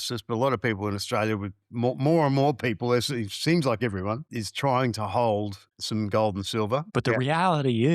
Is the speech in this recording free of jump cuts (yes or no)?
no